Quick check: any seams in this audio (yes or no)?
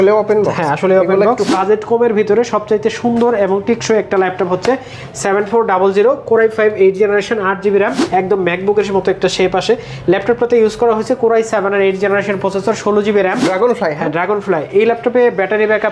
yes